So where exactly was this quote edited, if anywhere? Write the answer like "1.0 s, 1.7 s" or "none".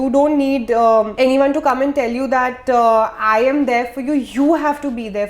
1.1 s

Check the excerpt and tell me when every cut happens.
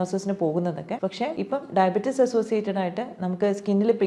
1.2 s

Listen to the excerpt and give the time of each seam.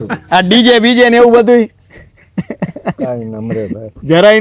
none

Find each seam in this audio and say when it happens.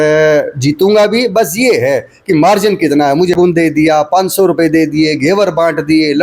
3.4 s

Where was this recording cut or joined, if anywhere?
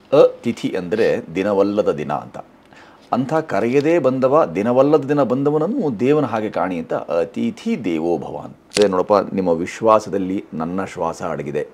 8.8 s

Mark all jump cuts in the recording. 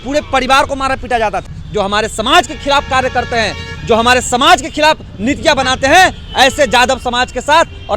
1.6 s

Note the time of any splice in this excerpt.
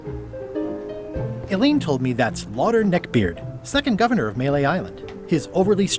1.4 s

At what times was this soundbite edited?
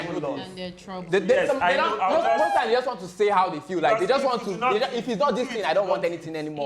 none

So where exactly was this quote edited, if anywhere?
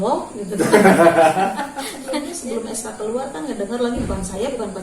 2.3 s

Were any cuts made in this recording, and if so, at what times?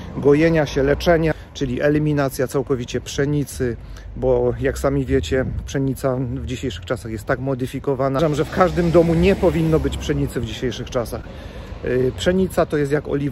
1.3 s, 8.2 s

